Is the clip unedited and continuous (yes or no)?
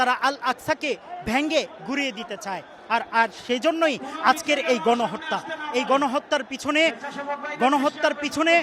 yes